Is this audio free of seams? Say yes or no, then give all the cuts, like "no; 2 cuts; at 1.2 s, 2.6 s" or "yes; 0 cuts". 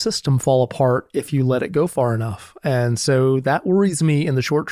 yes; 0 cuts